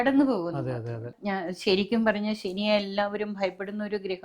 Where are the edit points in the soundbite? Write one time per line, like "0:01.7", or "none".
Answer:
0:01.2